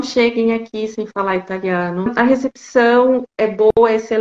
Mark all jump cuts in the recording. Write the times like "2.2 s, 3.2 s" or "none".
2.1 s